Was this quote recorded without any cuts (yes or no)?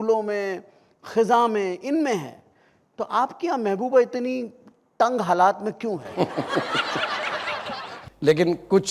no